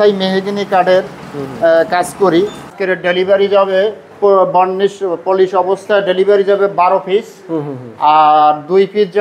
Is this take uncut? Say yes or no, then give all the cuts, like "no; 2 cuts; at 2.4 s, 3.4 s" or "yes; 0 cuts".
no; 2 cuts; at 2.7 s, 4.1 s